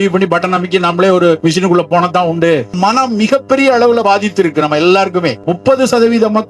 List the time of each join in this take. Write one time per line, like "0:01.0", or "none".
0:01.4
0:02.7
0:05.4